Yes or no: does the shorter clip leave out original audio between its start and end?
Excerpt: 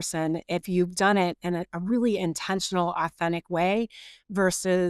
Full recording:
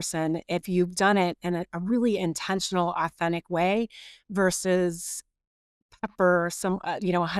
no